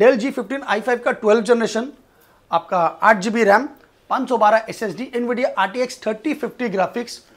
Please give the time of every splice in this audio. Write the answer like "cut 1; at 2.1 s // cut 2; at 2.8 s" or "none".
none